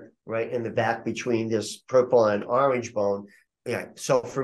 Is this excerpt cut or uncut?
cut